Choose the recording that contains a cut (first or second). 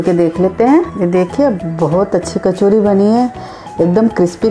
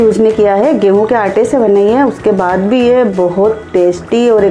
first